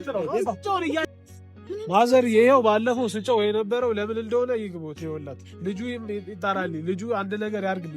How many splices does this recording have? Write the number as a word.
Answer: one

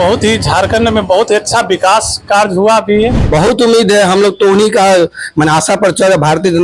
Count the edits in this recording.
one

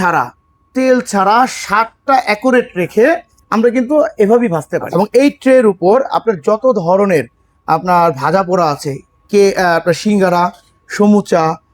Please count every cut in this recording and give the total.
one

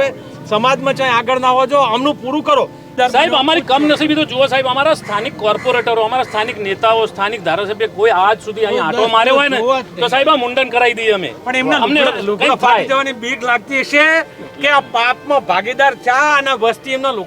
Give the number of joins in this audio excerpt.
one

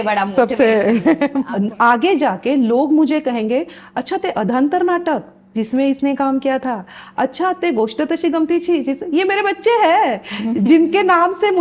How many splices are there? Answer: one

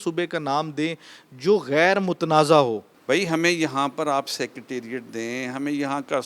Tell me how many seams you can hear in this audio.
one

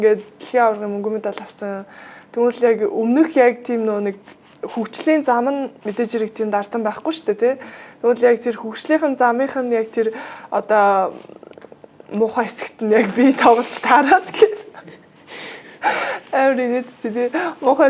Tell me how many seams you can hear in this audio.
zero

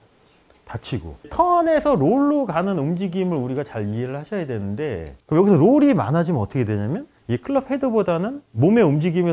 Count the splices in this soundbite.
two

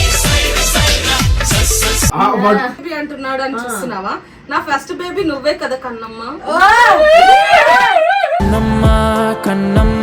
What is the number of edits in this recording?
one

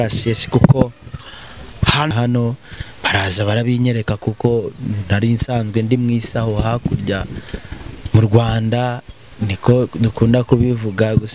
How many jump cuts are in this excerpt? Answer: one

